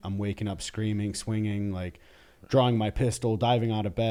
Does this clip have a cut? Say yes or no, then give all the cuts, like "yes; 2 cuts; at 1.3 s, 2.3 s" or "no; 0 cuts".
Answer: no; 0 cuts